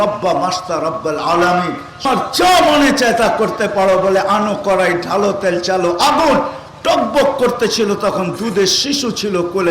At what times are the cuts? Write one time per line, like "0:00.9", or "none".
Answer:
0:02.0